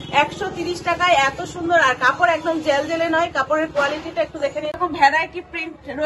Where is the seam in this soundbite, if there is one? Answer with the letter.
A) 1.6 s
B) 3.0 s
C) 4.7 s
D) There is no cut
C